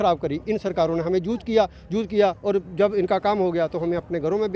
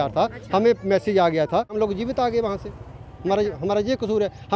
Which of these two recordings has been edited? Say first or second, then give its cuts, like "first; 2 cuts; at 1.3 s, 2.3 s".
second; 1 cut; at 1.7 s